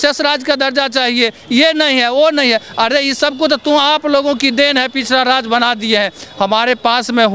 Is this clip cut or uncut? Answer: uncut